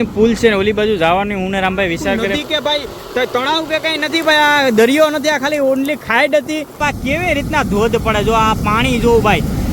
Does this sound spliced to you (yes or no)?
yes